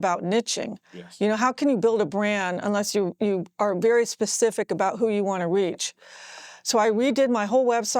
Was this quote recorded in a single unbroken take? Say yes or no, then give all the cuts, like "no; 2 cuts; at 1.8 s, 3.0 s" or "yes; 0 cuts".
yes; 0 cuts